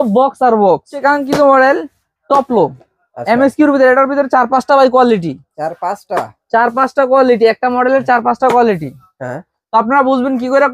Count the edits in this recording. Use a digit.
1